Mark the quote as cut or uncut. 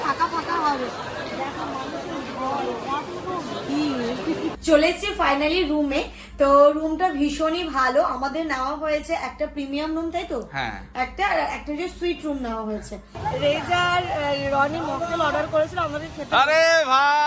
cut